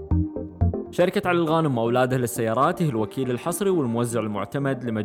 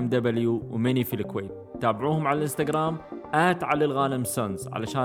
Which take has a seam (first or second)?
first